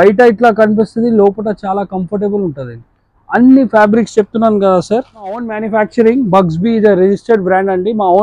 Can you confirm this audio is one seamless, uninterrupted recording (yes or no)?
no